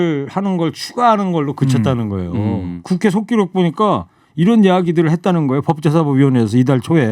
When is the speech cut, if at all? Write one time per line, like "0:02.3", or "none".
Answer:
0:02.7